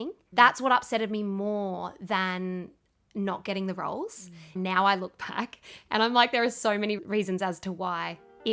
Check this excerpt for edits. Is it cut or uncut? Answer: cut